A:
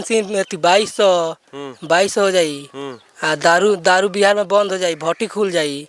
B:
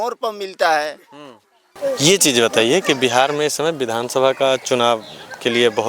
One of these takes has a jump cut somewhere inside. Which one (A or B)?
B